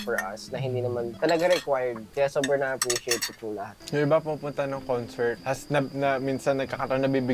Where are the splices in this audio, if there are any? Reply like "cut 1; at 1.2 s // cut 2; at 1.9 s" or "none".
cut 1; at 1.1 s // cut 2; at 2.0 s // cut 3; at 3.7 s // cut 4; at 5.4 s